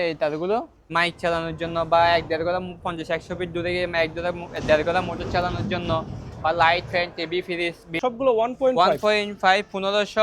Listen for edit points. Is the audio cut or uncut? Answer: cut